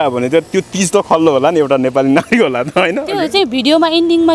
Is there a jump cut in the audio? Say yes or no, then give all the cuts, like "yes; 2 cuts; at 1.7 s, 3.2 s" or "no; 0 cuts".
no; 0 cuts